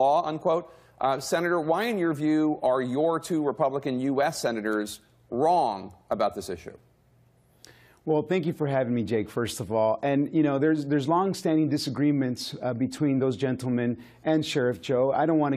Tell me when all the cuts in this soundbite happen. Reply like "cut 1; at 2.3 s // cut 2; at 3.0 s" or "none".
none